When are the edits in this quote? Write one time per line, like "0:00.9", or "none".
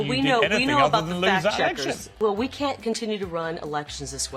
0:02.1